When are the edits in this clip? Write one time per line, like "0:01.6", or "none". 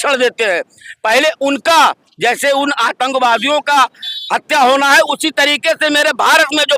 none